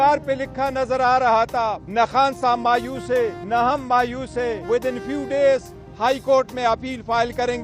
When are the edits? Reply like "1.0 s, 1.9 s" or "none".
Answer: 1.5 s, 3.4 s, 4.6 s